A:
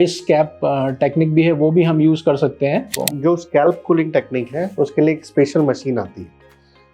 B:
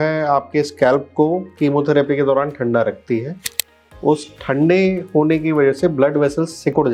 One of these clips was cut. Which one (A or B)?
A